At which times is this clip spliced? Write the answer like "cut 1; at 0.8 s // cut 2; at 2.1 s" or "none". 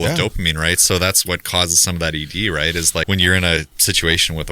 cut 1; at 1.2 s // cut 2; at 3.1 s